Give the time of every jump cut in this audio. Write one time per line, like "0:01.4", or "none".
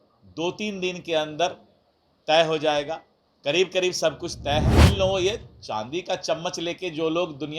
0:04.9